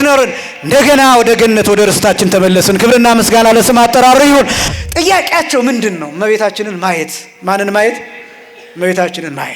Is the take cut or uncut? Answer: cut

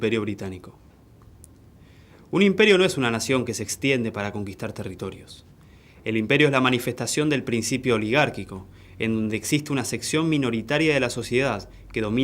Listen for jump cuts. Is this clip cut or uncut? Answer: cut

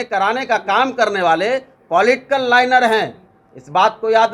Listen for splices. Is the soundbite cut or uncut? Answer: uncut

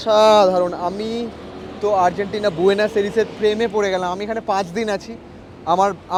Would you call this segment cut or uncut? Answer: uncut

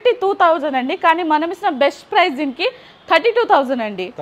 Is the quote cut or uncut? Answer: uncut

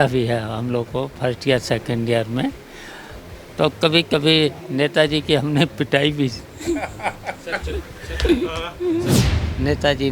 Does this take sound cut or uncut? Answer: cut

